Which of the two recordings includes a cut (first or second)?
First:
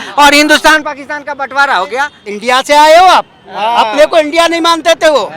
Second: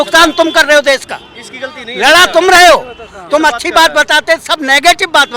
first